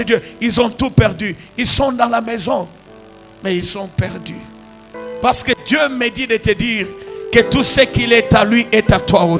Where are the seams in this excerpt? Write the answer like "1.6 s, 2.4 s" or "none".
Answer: 4.9 s

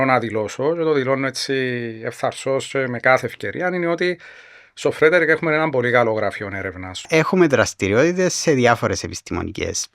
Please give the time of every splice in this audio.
7.1 s

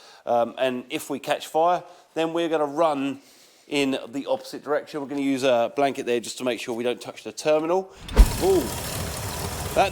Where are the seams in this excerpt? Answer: 8.0 s

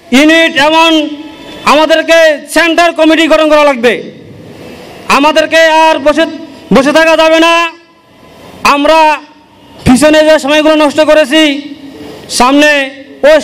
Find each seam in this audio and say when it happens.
none

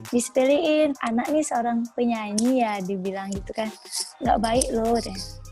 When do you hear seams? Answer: 1.0 s

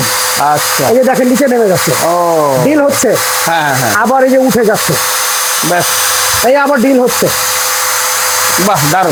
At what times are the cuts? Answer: none

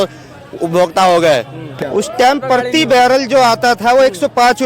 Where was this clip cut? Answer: 1.8 s

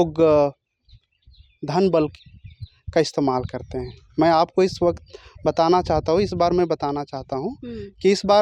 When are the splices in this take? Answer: none

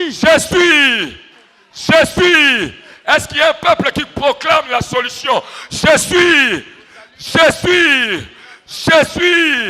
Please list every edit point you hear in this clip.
none

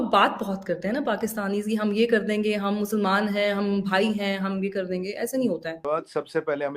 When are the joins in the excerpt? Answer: 5.8 s

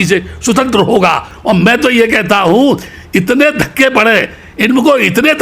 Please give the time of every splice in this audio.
1.3 s

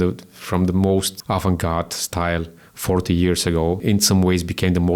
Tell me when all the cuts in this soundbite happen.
1.1 s, 3.8 s

